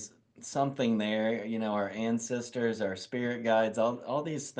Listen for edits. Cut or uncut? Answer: uncut